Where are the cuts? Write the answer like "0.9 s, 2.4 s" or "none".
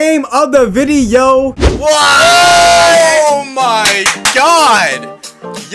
1.6 s